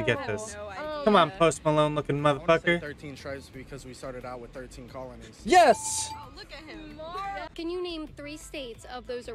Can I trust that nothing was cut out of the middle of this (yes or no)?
no